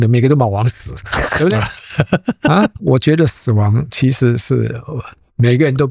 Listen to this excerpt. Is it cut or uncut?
cut